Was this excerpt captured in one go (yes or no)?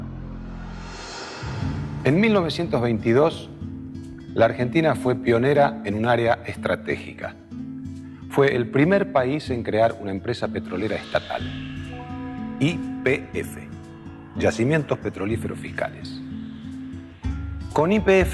no